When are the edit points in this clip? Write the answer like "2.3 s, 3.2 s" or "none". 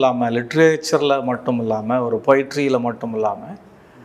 none

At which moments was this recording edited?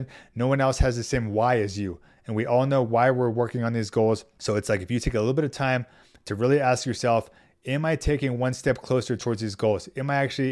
4.3 s

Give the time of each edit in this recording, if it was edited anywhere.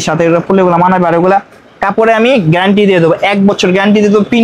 none

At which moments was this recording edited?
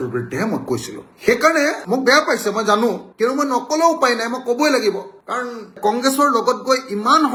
none

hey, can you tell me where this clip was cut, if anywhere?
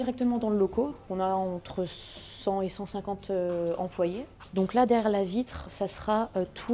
1.0 s, 4.3 s

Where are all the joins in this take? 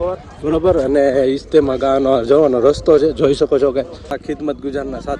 4.2 s

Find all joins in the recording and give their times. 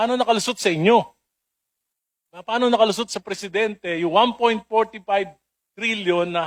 none

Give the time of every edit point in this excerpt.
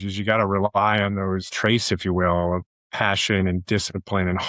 1.5 s, 2.7 s

